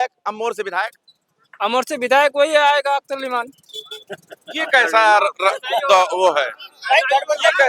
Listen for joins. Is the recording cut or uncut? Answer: uncut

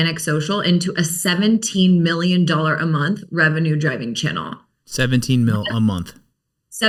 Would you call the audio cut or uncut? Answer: uncut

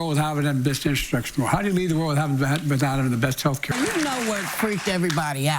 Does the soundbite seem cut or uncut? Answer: cut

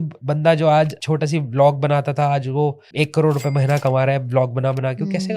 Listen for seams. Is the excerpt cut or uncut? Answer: cut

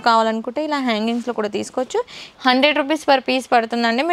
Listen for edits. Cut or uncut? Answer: cut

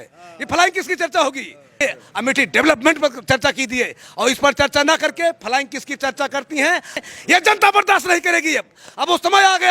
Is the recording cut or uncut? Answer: cut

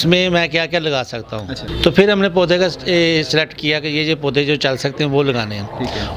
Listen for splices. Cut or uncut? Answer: cut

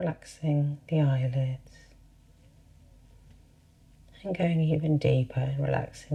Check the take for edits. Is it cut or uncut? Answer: uncut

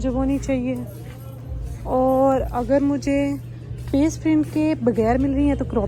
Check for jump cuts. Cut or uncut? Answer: uncut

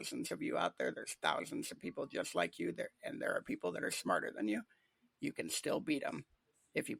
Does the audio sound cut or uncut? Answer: uncut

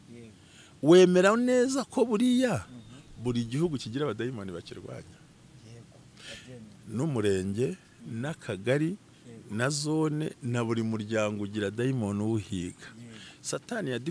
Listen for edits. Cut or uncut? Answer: uncut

